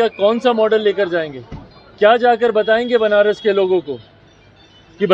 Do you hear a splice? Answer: no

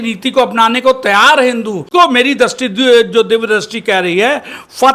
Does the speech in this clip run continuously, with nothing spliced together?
no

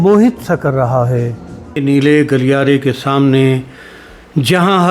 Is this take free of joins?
no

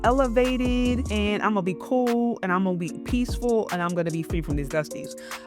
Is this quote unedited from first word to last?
no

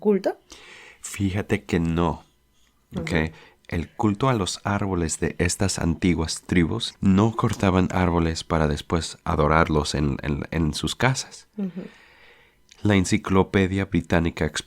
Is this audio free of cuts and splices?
no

